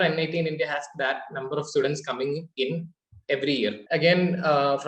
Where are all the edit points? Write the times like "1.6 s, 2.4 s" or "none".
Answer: 3.8 s